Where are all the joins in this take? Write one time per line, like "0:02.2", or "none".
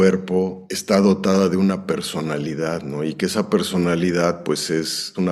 none